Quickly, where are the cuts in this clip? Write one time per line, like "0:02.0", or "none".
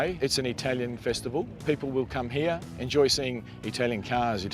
0:01.5
0:02.7